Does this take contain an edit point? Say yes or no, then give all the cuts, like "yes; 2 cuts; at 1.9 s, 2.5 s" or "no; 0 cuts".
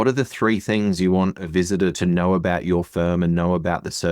yes; 1 cut; at 1.9 s